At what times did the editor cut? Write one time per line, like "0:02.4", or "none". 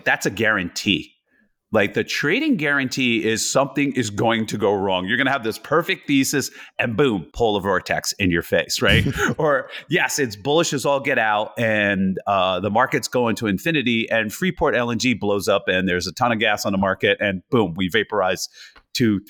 none